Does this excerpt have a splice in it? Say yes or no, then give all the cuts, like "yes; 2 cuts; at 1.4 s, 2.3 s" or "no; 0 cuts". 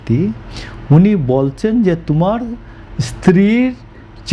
no; 0 cuts